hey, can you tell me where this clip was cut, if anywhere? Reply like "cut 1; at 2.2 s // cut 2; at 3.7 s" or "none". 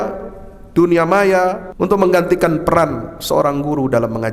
cut 1; at 1.7 s